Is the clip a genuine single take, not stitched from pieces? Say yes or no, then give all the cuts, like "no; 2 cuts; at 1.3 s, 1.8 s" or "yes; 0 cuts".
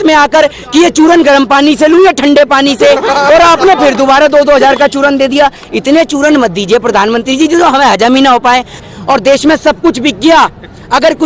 no; 1 cut; at 8.8 s